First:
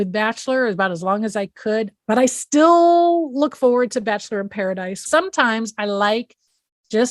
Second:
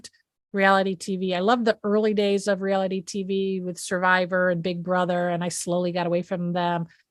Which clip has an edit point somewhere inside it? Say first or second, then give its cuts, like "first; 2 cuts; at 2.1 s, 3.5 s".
first; 2 cuts; at 1.9 s, 5.1 s